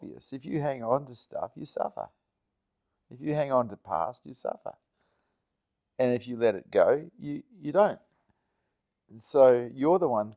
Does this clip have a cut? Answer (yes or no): no